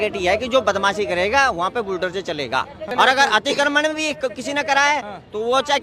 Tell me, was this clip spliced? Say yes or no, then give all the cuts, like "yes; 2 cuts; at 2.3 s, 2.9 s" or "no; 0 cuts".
yes; 1 cut; at 2.9 s